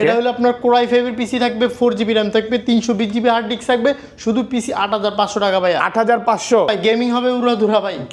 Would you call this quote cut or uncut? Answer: cut